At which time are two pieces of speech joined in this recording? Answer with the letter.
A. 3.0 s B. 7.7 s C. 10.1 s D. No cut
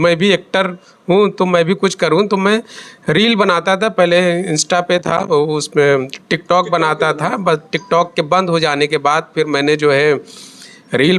D